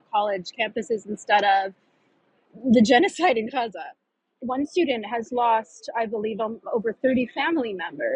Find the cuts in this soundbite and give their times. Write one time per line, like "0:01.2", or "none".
0:04.3